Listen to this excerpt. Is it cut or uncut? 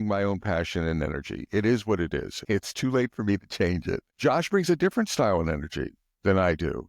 cut